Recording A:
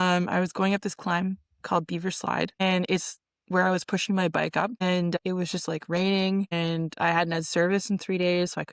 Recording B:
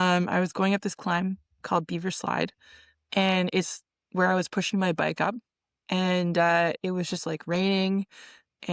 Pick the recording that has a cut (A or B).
A